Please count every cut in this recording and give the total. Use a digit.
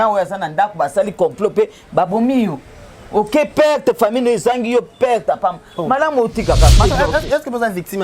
1